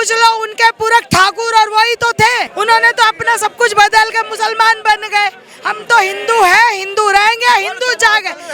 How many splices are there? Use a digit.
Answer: 0